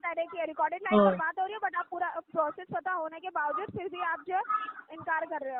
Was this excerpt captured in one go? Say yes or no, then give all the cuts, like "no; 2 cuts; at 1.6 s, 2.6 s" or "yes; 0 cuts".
yes; 0 cuts